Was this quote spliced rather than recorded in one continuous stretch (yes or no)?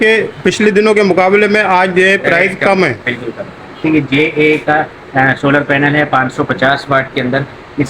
yes